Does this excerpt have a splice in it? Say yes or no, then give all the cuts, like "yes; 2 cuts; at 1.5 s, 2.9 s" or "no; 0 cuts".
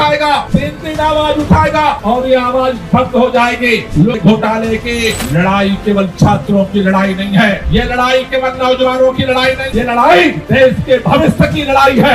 yes; 2 cuts; at 4.1 s, 9.7 s